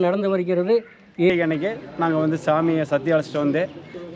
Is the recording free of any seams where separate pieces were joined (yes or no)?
no